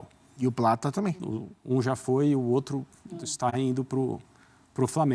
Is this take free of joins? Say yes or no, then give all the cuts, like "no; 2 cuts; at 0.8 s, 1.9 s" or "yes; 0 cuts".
no; 1 cut; at 1.2 s